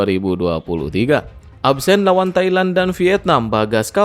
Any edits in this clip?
yes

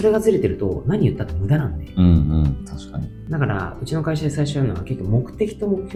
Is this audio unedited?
yes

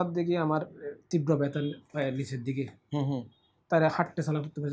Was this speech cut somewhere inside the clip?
no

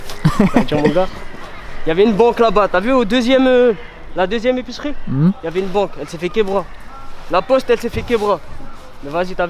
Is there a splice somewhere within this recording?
no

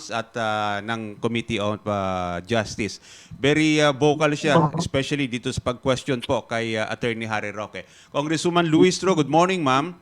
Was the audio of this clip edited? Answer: no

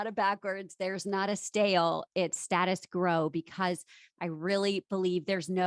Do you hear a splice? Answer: yes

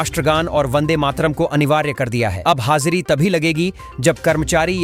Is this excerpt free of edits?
yes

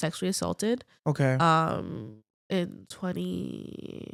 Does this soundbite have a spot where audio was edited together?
no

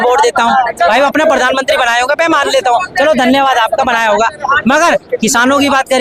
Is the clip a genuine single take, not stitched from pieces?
yes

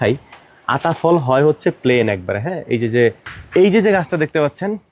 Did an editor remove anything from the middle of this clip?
yes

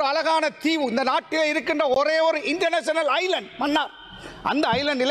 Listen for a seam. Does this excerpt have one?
no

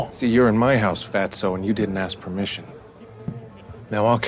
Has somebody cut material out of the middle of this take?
no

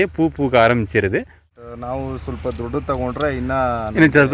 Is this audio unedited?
no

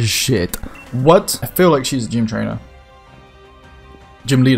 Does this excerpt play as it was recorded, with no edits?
no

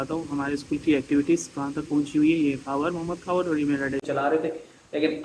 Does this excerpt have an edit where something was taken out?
yes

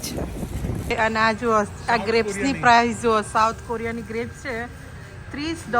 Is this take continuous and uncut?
no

